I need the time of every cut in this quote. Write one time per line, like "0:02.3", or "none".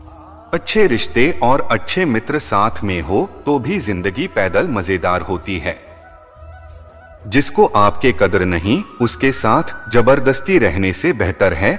0:05.9
0:07.2